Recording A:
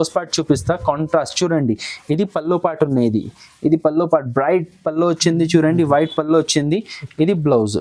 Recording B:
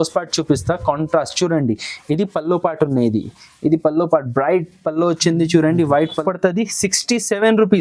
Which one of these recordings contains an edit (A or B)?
B